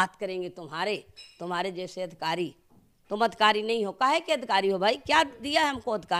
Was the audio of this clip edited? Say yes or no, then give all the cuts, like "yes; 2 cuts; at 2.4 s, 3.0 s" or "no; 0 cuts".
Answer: no; 0 cuts